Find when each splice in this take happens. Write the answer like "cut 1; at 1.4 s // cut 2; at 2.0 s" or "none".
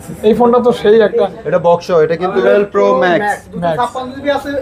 cut 1; at 2.3 s

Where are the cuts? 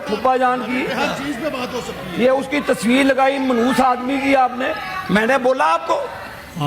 none

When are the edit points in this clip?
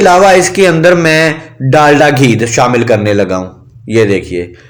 none

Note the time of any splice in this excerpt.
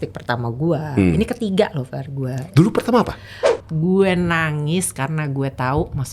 cut 1; at 3.5 s

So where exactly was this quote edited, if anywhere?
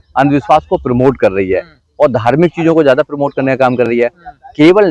none

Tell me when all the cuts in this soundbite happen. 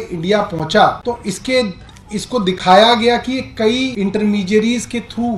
cut 1; at 1.0 s // cut 2; at 3.9 s

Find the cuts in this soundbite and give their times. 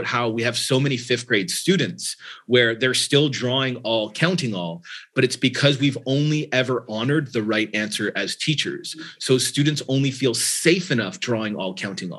none

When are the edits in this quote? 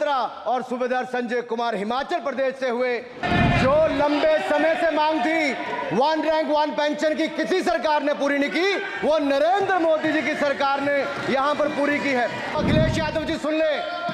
cut 1; at 3.2 s // cut 2; at 12.6 s

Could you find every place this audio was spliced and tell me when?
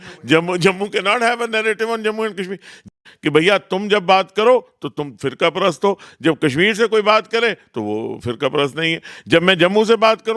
cut 1; at 2.9 s

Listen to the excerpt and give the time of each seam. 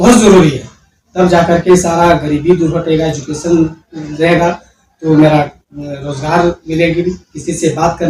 none

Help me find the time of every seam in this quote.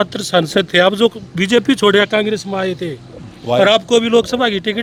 none

